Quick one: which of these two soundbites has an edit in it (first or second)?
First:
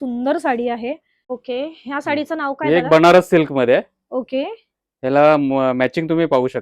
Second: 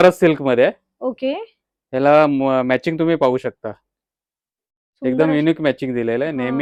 first